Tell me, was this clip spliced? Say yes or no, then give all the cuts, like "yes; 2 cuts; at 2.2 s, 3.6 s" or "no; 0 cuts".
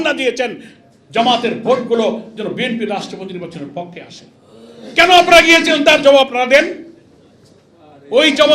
no; 0 cuts